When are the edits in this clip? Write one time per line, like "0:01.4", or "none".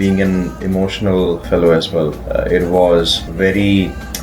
0:01.4
0:03.2